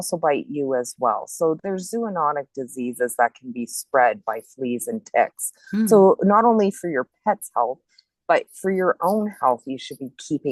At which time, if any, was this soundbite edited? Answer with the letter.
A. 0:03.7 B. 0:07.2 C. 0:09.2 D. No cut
D